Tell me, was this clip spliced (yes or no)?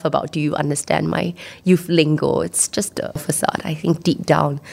yes